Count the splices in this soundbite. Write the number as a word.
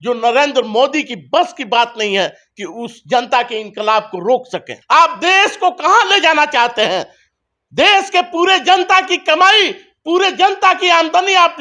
one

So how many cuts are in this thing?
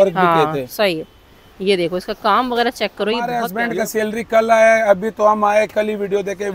one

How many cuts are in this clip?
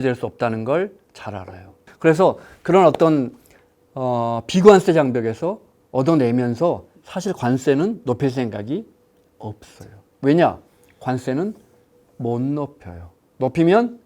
one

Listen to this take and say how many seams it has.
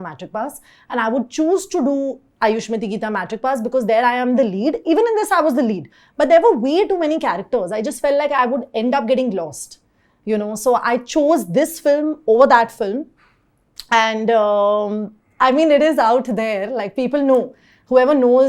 zero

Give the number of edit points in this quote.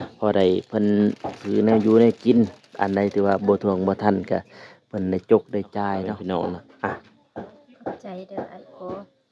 one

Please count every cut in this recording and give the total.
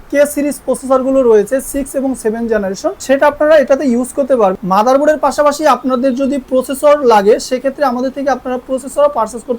one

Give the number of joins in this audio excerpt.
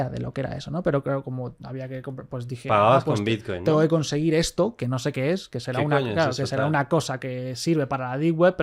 zero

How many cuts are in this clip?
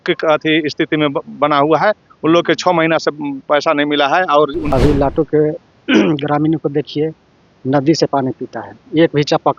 one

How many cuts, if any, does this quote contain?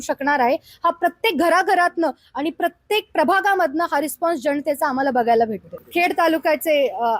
one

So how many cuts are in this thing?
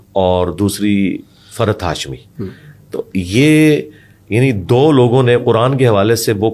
zero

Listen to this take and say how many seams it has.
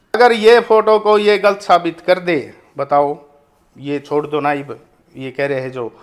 zero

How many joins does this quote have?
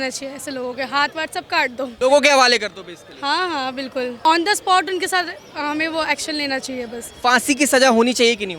two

